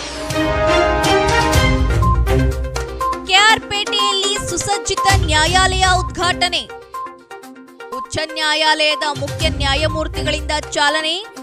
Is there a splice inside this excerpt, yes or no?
yes